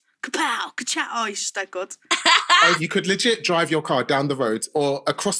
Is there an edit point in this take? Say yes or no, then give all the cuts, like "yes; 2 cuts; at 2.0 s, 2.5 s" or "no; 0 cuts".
yes; 1 cut; at 2.8 s